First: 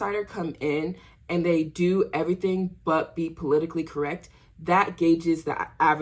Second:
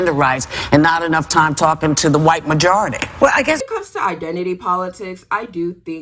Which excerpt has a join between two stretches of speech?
second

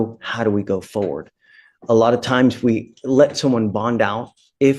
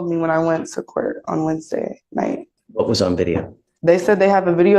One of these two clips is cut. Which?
second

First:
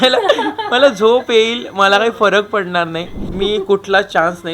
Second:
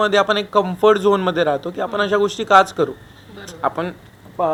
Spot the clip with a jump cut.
first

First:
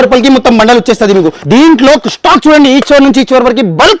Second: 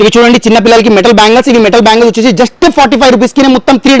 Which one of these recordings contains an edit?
first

